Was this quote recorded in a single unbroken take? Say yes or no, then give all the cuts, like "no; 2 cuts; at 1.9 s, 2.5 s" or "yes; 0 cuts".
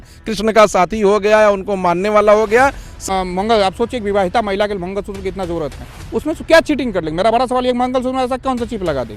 no; 1 cut; at 2.9 s